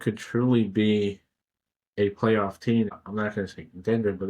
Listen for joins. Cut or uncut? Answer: cut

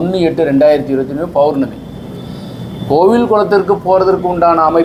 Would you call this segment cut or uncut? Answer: uncut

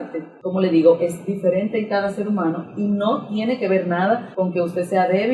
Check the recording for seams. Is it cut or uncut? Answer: cut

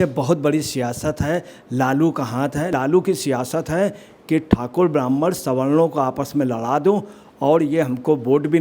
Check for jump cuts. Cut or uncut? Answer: cut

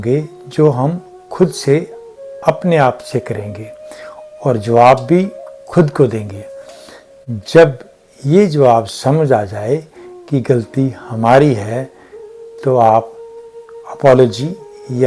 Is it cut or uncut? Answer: uncut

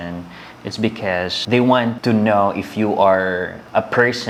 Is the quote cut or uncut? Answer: uncut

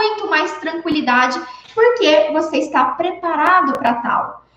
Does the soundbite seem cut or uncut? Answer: cut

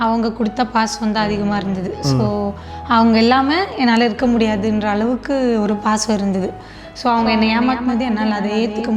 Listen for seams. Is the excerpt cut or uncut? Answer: uncut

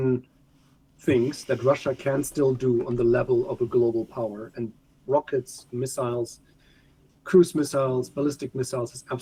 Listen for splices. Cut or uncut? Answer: uncut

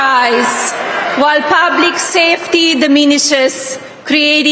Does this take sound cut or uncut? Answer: uncut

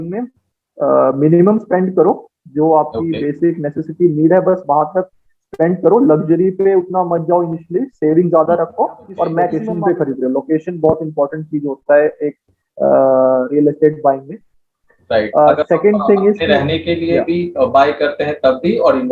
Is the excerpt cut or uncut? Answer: cut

